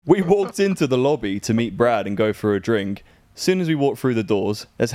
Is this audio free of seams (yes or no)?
yes